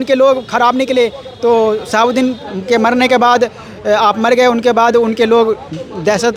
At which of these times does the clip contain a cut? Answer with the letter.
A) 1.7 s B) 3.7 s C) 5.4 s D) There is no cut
D